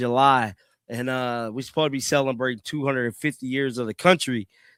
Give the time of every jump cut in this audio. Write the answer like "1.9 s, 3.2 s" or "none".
none